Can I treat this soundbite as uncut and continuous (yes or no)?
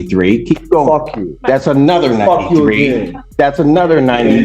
yes